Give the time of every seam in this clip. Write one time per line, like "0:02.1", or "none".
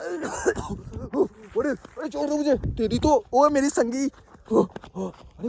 none